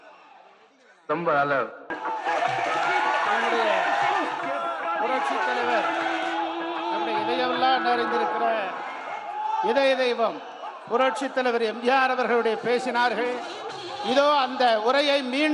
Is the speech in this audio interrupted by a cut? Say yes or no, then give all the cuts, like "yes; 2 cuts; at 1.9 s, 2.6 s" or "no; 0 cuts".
yes; 1 cut; at 1.9 s